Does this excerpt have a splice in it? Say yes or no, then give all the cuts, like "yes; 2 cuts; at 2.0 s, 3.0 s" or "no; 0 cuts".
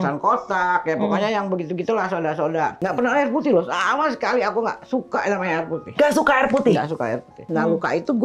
yes; 2 cuts; at 2.8 s, 7.4 s